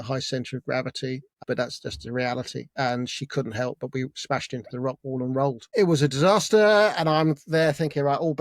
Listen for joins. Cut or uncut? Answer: cut